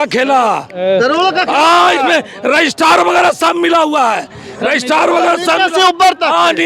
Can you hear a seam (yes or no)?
no